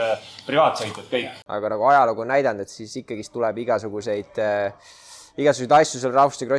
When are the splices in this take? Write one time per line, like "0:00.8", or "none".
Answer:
0:01.4